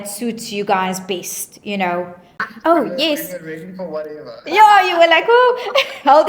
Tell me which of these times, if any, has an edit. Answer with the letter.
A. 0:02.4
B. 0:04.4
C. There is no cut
A